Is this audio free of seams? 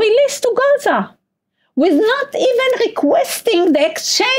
yes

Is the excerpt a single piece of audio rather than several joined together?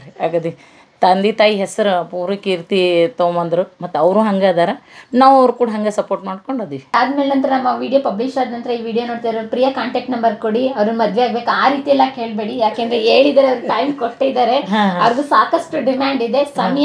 no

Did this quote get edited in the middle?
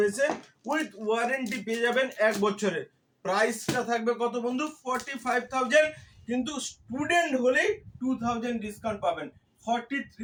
no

